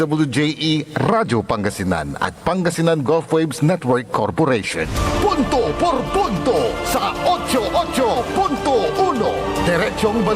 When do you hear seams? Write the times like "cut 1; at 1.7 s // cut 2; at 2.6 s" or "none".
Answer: cut 1; at 4.9 s

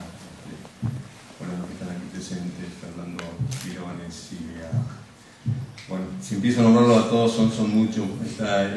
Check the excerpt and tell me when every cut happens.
none

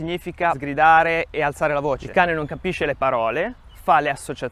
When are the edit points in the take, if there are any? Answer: cut 1; at 2.0 s

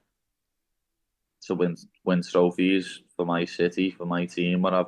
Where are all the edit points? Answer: cut 1; at 1.9 s

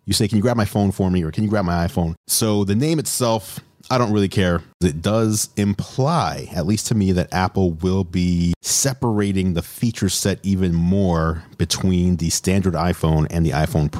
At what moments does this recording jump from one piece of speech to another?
cut 1; at 4.8 s

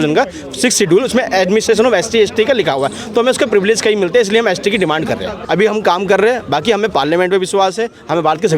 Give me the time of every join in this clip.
cut 1; at 5.3 s

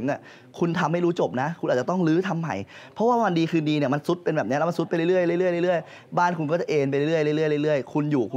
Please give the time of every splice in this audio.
none

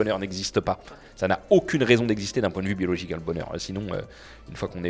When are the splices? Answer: none

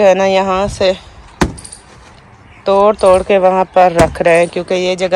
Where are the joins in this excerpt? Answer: none

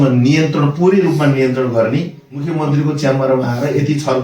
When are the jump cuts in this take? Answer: cut 1; at 2.5 s

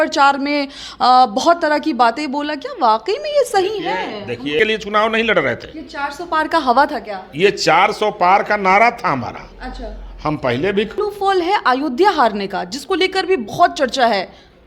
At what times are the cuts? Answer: cut 1; at 4.6 s // cut 2; at 11.0 s

